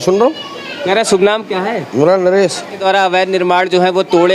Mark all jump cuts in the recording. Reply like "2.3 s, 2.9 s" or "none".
2.8 s